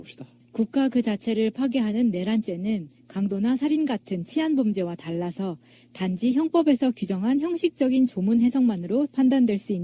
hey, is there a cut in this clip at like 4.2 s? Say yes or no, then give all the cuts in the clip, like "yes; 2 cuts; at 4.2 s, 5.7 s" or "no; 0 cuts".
yes; 1 cut; at 4.2 s